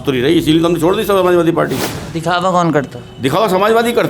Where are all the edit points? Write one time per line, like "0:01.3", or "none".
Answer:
0:02.0